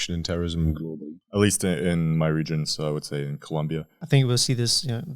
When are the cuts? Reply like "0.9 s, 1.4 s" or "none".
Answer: 3.9 s